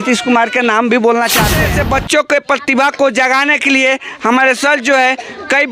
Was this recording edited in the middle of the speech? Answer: yes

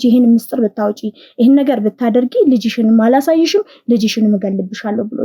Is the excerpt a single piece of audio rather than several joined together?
yes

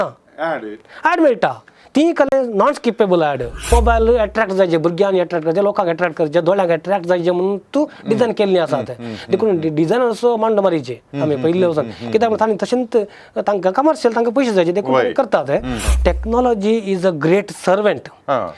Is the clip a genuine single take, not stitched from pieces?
no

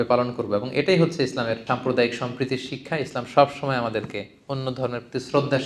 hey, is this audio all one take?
no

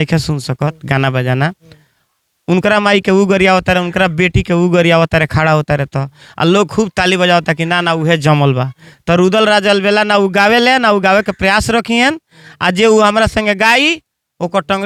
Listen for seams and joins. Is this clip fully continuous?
yes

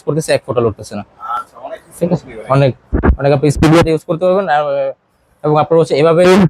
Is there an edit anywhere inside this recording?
no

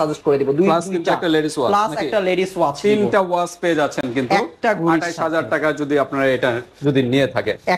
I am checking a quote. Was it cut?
no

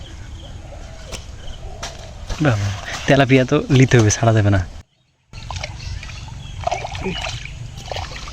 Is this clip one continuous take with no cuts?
no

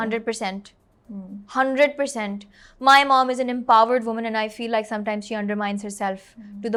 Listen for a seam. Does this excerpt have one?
no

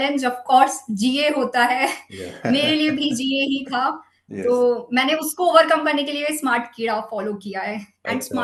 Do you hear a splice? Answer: no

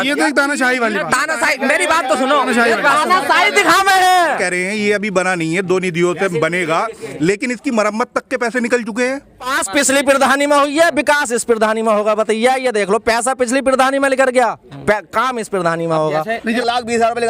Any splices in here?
yes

